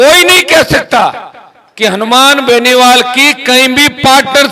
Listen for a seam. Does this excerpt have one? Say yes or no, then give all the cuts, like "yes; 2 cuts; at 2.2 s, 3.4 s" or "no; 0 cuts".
no; 0 cuts